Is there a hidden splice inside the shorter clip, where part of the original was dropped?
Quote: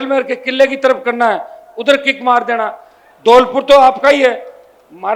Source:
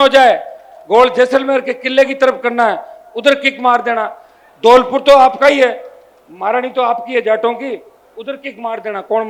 no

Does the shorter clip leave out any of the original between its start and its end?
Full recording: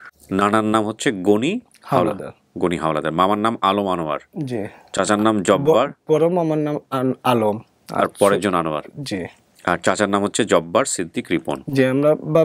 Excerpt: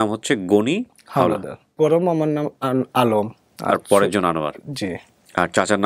yes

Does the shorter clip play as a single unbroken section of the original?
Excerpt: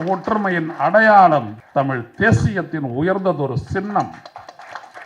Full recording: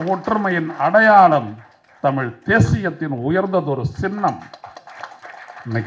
no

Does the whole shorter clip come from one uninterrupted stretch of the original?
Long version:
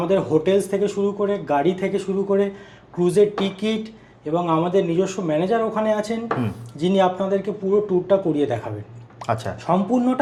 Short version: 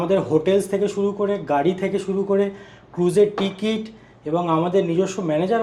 yes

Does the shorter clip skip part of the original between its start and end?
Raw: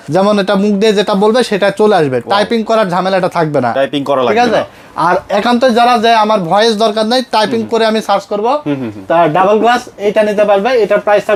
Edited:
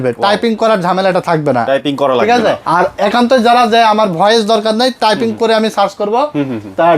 yes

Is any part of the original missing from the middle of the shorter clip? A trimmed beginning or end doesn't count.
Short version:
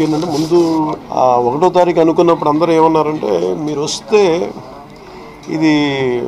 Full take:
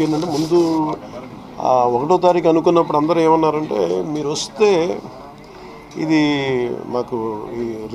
yes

